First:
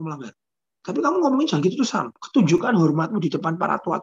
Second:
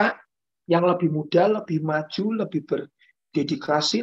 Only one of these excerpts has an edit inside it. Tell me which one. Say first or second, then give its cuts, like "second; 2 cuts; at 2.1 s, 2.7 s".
first; 1 cut; at 2.2 s